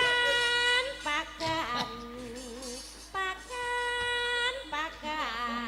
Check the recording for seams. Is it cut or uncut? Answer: uncut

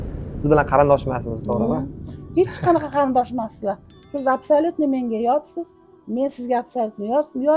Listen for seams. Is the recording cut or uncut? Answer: uncut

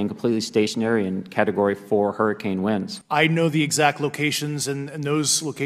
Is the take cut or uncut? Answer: cut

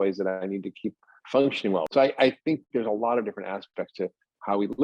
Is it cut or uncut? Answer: cut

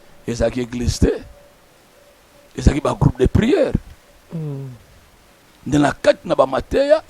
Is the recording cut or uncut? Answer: uncut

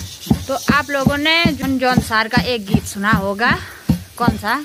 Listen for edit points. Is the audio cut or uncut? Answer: cut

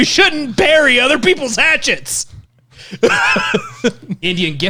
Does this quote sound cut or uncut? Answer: uncut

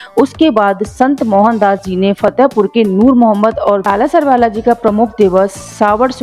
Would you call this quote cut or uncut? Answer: cut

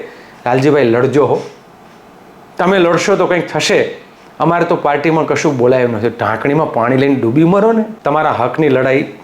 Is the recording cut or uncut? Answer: cut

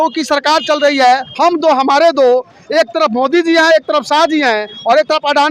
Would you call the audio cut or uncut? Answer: uncut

